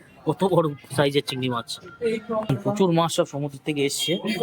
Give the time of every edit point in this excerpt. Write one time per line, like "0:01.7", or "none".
0:02.5